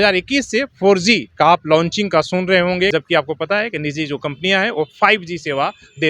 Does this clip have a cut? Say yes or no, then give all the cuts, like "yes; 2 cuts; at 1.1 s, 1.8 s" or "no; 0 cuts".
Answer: yes; 2 cuts; at 1.3 s, 2.9 s